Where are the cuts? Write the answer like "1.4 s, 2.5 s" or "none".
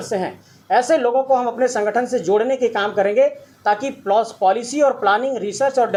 none